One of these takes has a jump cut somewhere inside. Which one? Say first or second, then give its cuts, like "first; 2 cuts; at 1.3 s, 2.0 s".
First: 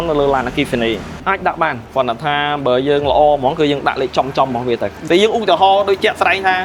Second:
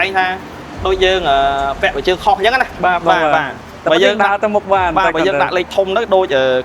first; 2 cuts; at 1.1 s, 5.0 s